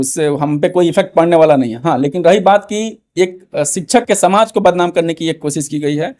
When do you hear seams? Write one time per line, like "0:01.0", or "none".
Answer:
none